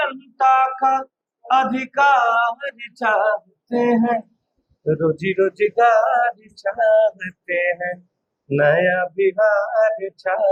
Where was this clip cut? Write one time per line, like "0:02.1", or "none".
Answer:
none